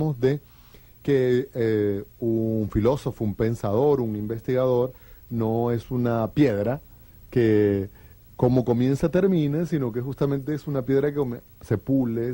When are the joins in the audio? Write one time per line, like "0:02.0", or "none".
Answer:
0:01.9